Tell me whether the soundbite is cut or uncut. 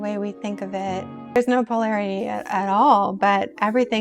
cut